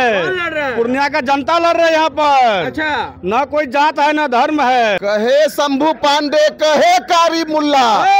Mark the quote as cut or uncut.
cut